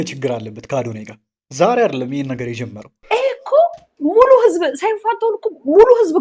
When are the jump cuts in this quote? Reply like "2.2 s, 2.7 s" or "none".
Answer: 2.9 s